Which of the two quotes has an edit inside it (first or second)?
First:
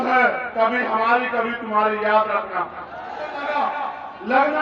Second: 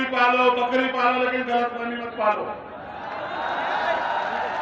first